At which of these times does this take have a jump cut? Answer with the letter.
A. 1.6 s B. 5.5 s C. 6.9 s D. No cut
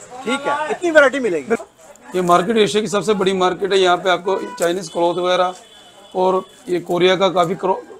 A